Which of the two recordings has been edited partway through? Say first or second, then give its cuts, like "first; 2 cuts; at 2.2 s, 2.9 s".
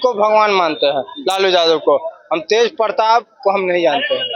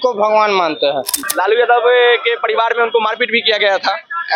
second; 1 cut; at 1.1 s